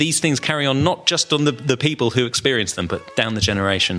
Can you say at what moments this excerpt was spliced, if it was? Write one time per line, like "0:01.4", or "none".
0:03.1